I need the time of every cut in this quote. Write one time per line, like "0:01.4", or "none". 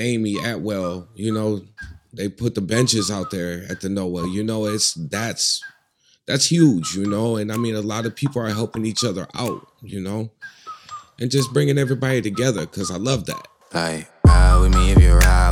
0:13.5